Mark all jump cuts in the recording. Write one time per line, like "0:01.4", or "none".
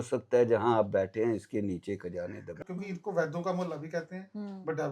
0:02.5

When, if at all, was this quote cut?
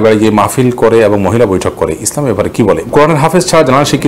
0:02.8

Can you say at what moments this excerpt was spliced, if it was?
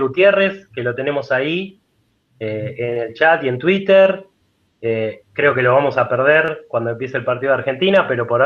none

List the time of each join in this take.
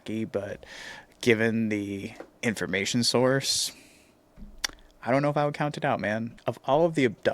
0:06.3

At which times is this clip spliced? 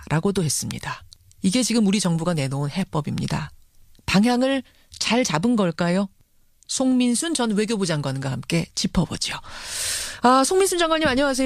none

